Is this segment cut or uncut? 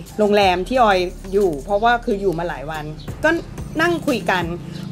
uncut